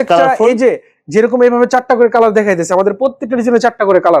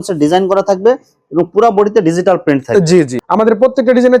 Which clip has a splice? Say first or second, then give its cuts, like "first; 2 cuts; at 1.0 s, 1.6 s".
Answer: second; 1 cut; at 3.2 s